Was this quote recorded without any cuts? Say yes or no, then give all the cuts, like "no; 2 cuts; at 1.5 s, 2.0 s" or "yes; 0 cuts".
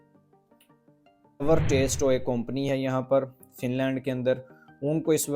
no; 1 cut; at 1.4 s